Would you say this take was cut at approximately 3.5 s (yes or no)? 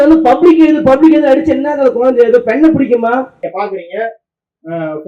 yes